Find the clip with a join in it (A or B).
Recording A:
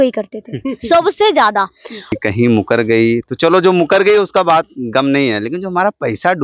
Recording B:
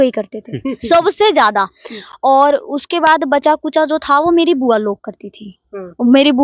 A